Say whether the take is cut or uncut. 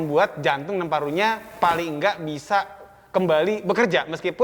uncut